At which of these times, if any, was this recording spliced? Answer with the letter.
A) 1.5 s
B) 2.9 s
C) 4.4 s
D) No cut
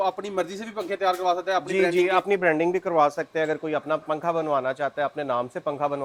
D